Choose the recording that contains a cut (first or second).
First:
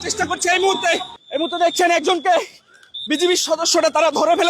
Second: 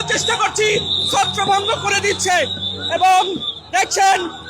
first